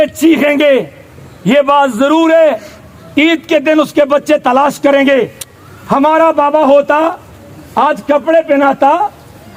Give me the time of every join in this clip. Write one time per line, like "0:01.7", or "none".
none